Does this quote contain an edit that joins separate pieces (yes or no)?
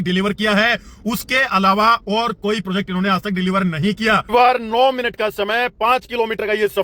yes